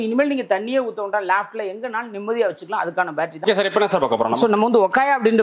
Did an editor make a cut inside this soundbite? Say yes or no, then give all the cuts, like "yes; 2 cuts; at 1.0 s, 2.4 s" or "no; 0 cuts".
yes; 1 cut; at 3.4 s